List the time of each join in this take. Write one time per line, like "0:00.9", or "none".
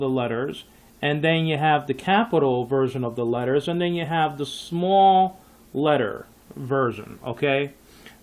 0:06.5